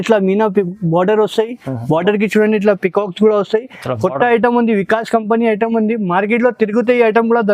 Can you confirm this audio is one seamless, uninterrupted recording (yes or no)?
yes